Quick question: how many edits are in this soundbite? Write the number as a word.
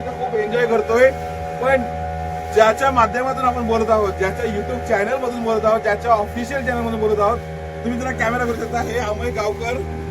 zero